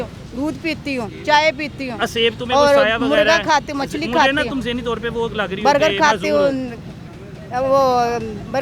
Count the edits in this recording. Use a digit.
0